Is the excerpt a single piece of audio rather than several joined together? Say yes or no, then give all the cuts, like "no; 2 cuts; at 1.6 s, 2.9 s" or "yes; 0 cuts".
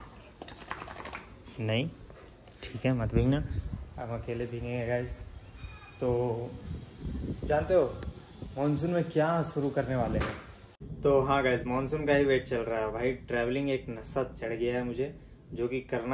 yes; 0 cuts